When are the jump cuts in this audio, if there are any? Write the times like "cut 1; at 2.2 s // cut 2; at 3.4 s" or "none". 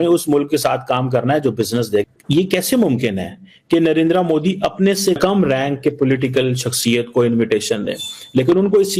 cut 1; at 2.0 s // cut 2; at 5.2 s